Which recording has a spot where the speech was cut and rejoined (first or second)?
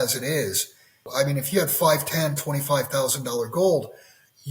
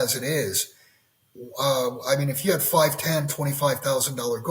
first